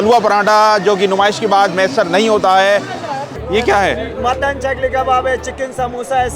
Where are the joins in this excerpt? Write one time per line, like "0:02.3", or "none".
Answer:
0:03.3